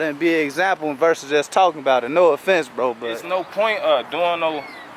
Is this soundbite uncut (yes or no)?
no